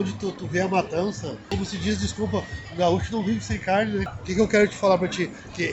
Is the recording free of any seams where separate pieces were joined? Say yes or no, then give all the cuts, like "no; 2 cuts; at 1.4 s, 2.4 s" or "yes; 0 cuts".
no; 2 cuts; at 1.5 s, 4.1 s